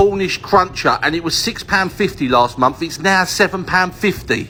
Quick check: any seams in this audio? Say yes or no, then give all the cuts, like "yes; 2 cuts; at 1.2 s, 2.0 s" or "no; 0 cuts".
no; 0 cuts